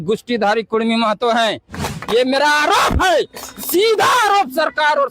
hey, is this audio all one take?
no; 1 cut; at 1.7 s

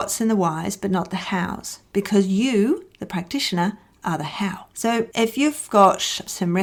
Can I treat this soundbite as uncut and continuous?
yes; 0 cuts

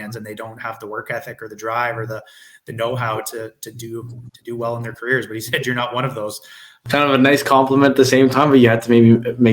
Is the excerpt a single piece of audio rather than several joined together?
no; 1 cut; at 6.8 s

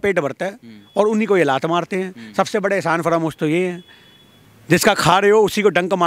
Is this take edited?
no; 0 cuts

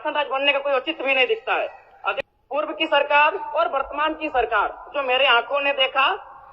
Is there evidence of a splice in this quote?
yes; 1 cut; at 2.2 s

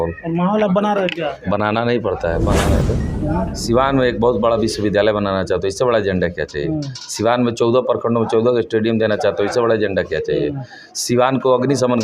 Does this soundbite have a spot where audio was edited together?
yes; 1 cut; at 2.8 s

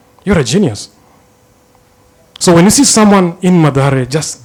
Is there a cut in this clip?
no; 0 cuts

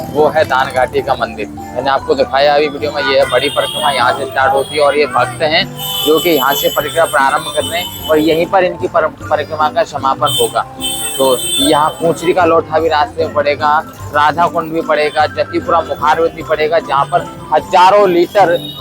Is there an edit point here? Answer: no; 0 cuts

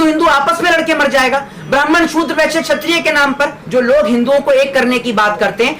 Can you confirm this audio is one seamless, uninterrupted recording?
no; 1 cut; at 3.6 s

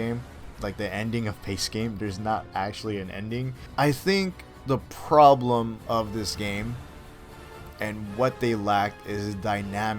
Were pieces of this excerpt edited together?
yes; 1 cut; at 3.6 s

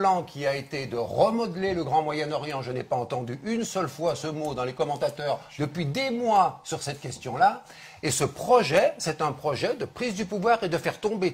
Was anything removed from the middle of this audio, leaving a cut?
no; 0 cuts

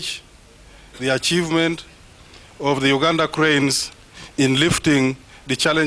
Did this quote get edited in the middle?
no; 0 cuts

